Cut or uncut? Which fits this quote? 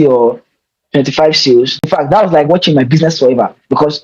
cut